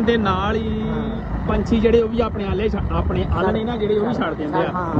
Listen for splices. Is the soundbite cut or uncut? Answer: uncut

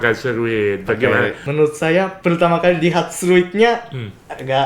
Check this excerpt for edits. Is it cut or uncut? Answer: cut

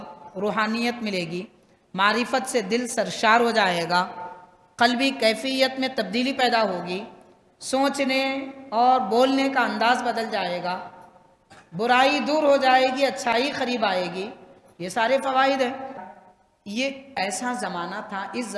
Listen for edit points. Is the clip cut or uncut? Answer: cut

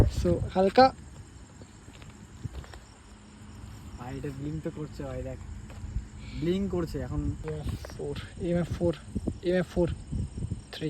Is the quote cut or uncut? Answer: cut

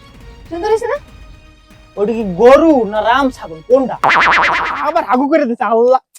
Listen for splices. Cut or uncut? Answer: cut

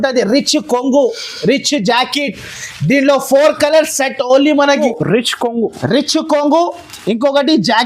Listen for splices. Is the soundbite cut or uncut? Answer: cut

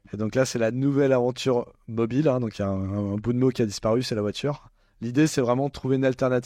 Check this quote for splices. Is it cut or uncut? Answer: uncut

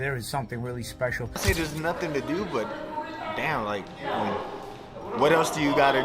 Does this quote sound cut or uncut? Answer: cut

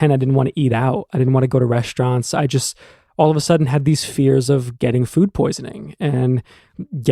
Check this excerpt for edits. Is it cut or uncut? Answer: uncut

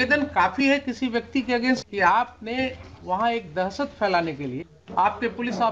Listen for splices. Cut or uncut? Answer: cut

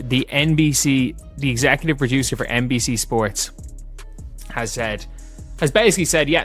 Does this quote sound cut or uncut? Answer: uncut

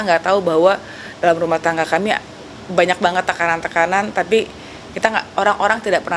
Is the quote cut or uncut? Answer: uncut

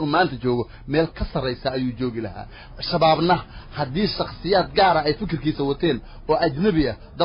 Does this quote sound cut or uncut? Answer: uncut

